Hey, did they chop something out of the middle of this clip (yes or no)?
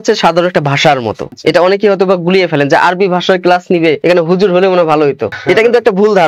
yes